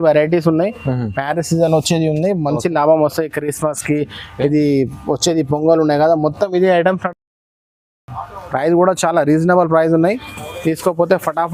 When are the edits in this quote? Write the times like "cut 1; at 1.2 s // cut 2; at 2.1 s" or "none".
none